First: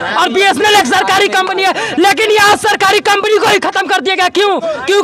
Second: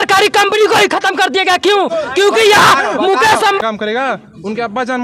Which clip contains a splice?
second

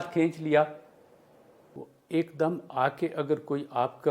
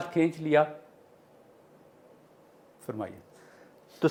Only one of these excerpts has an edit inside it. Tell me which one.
first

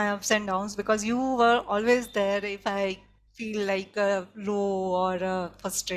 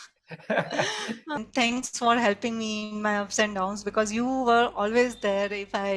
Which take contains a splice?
second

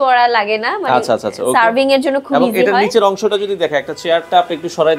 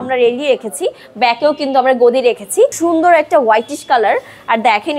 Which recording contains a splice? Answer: second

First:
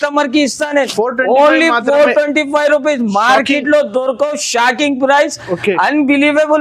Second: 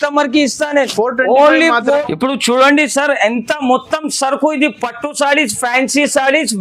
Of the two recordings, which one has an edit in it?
second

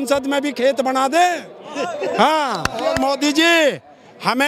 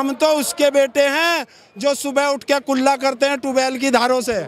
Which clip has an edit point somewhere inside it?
first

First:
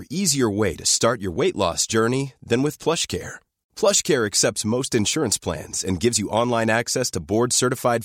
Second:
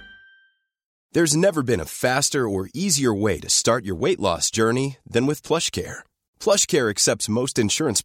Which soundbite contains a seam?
second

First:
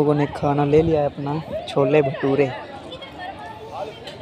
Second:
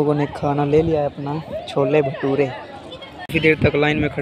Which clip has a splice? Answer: second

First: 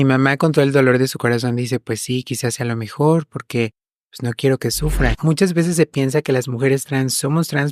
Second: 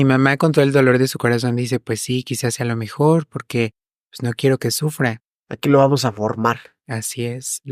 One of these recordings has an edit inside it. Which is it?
first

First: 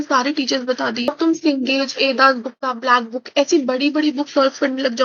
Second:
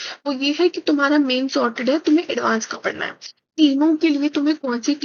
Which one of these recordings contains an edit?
first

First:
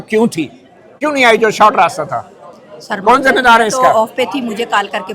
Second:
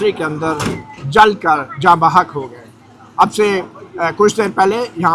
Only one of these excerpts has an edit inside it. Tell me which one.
first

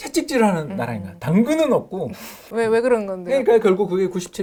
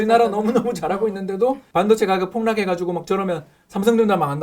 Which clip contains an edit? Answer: second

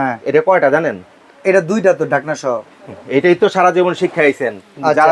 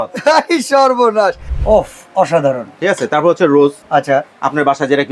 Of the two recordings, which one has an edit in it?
second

